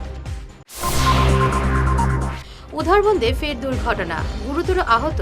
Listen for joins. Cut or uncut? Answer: cut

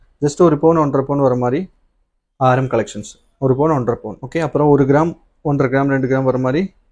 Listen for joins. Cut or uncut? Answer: cut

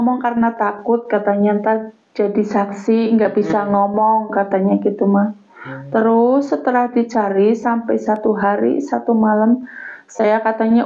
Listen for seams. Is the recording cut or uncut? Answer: uncut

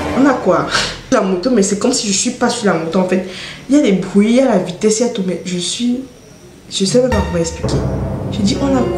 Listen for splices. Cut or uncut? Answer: cut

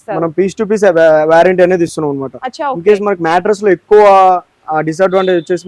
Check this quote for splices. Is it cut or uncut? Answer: uncut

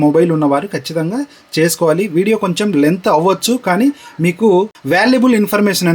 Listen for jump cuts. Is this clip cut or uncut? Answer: uncut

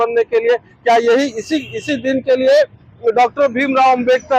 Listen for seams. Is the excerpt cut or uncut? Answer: uncut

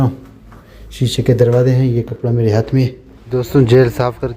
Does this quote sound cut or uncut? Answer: cut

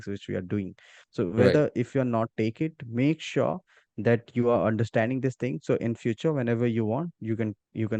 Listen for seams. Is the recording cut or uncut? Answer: uncut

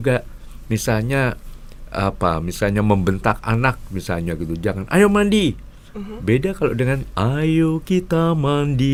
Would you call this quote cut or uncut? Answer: uncut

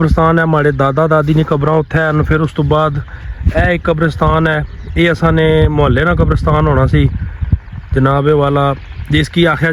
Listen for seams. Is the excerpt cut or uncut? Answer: uncut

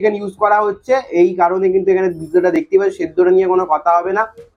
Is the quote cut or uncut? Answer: uncut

